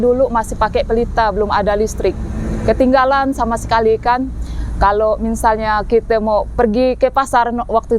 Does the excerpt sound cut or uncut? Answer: uncut